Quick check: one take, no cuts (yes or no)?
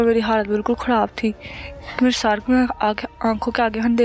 yes